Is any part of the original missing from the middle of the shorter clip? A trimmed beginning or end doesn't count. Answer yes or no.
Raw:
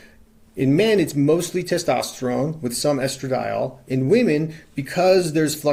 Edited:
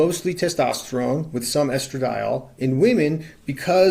no